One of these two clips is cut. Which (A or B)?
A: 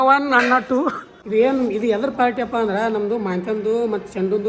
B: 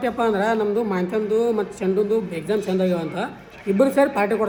A